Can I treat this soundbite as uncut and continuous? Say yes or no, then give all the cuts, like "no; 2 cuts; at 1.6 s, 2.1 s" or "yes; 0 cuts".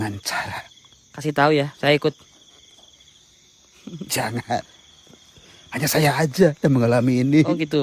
yes; 0 cuts